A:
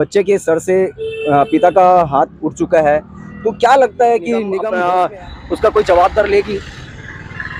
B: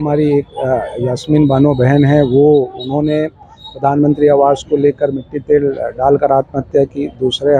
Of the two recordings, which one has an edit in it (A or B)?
A